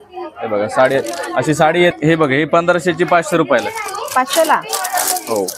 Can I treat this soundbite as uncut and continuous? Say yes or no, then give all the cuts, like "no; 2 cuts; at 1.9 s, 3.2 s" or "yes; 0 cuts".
no; 1 cut; at 1.9 s